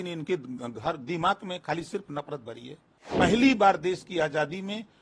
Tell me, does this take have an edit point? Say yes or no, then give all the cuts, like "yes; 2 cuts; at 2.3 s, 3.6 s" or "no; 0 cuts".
yes; 1 cut; at 3.1 s